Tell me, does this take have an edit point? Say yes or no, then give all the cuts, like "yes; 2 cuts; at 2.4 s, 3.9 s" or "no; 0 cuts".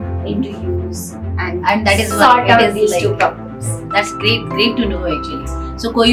no; 0 cuts